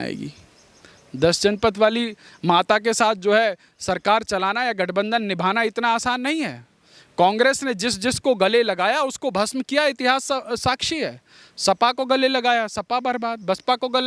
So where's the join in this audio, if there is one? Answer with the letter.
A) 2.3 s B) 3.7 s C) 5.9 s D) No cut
D